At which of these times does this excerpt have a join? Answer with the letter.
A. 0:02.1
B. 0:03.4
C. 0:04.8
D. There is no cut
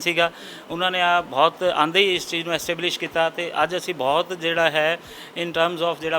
D